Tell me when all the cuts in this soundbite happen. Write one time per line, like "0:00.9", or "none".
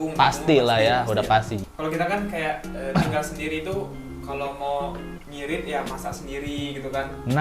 0:01.5

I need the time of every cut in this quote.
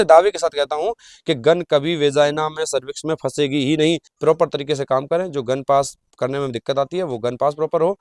0:04.1

